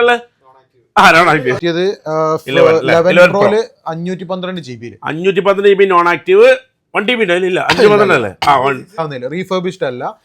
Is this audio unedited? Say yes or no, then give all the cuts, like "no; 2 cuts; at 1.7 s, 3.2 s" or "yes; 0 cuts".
no; 2 cuts; at 1.6 s, 9.0 s